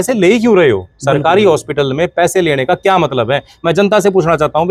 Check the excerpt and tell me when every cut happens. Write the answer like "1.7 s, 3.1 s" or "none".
none